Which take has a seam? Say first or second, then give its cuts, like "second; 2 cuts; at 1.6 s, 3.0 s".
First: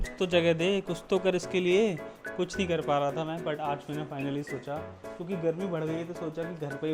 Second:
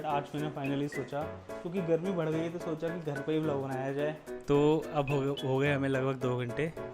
second; 1 cut; at 4.3 s